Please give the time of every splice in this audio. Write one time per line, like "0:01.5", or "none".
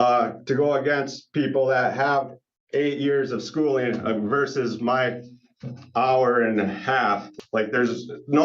0:07.3